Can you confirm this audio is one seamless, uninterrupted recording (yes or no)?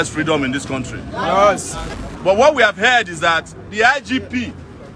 no